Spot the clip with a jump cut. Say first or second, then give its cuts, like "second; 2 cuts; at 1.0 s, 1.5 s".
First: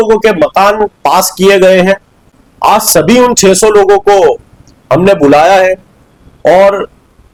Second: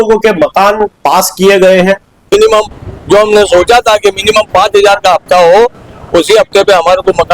second; 1 cut; at 2.3 s